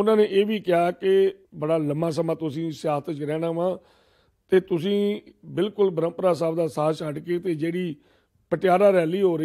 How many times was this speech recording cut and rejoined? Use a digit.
1